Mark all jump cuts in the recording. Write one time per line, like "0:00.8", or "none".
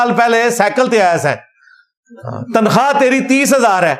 none